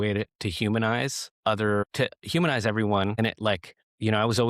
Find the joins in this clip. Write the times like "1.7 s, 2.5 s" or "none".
1.2 s, 1.9 s, 3.3 s

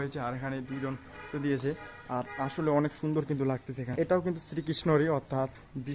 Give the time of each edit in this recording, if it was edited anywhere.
3.9 s

